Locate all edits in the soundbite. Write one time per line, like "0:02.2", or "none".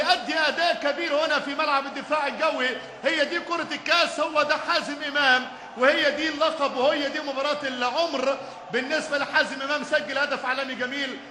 0:04.4